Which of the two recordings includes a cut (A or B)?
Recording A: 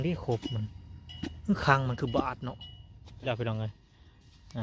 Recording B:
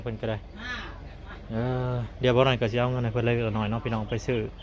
A